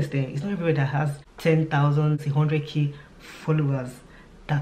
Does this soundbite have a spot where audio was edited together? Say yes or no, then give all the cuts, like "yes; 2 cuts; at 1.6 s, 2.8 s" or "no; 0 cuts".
yes; 2 cuts; at 1.2 s, 2.2 s